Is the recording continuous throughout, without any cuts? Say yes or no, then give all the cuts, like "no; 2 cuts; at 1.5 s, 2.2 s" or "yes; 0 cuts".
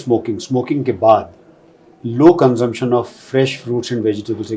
yes; 0 cuts